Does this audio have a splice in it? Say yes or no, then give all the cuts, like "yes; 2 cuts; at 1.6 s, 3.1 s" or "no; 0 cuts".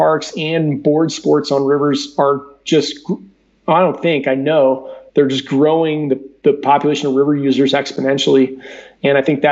no; 0 cuts